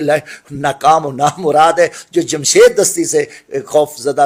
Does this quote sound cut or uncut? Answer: uncut